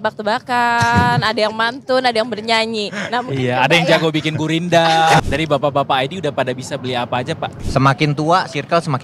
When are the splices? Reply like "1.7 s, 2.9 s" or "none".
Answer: 5.2 s, 7.6 s